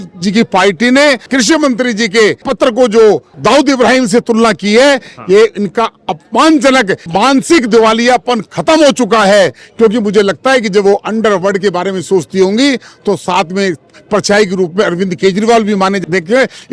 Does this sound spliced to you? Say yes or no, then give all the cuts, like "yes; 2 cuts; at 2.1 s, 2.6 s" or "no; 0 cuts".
yes; 5 cuts; at 1.3 s, 2.5 s, 3.3 s, 7.0 s, 16.0 s